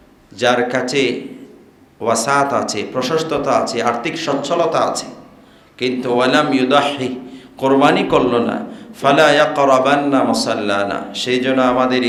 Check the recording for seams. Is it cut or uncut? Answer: uncut